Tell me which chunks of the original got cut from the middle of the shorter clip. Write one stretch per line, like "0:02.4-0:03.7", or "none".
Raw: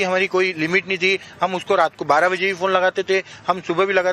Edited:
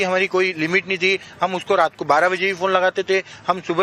none